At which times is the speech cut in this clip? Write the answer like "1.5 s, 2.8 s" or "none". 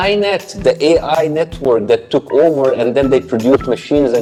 none